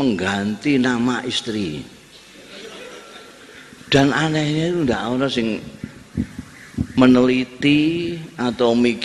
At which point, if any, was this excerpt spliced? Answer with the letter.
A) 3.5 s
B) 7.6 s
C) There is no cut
A